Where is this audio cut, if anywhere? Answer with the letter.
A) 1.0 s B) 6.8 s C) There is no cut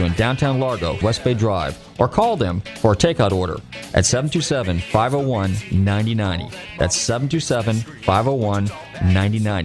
A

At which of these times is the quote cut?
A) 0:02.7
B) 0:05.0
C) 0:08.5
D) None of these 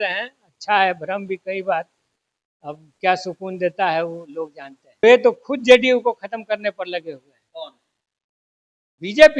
B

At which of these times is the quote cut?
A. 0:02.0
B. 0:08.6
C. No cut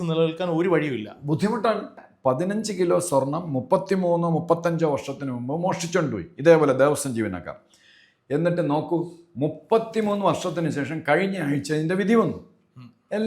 A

